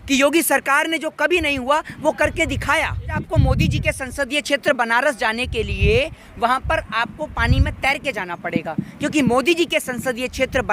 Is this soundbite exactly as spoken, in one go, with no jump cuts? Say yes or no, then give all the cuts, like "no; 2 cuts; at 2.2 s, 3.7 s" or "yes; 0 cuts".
no; 1 cut; at 3.1 s